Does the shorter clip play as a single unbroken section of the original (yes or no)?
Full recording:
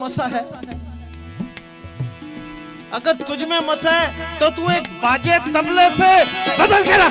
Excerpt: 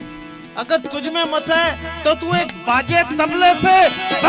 yes